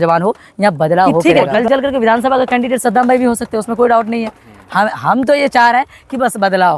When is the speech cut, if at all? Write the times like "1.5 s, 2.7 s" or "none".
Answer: 1.2 s

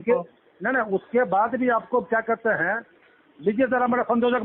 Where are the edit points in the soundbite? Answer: none

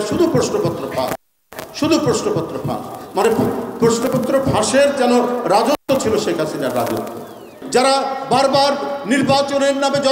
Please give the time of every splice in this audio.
7.5 s

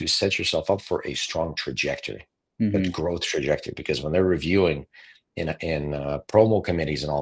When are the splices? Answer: none

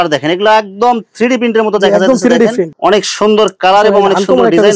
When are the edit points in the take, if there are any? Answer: 2.7 s

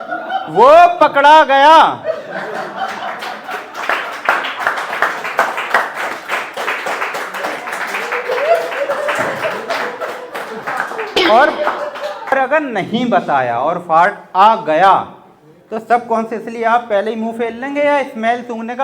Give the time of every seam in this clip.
12.3 s

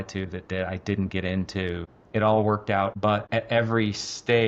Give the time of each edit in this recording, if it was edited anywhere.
1.9 s, 3.0 s

